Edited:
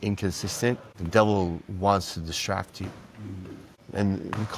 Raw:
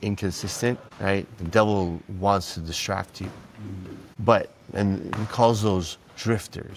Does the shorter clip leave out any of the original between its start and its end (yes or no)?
yes